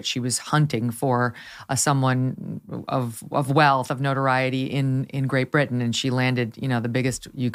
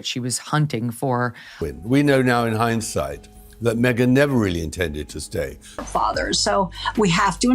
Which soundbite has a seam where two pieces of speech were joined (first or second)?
second